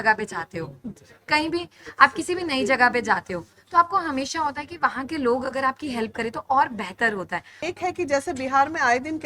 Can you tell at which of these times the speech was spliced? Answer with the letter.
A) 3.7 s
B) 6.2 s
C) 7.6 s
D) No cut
C